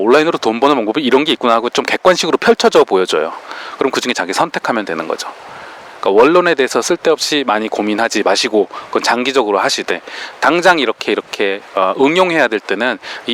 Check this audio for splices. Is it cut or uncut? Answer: uncut